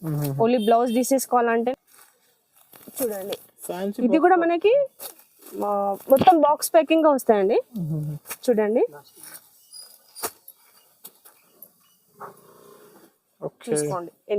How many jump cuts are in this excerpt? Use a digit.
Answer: 2